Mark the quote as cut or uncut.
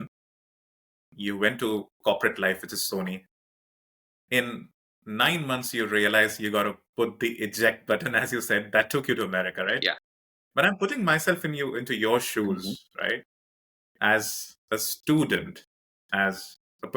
uncut